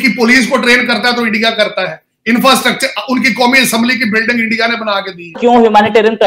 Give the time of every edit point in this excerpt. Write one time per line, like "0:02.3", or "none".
0:05.4

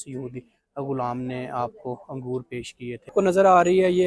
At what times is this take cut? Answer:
0:03.1

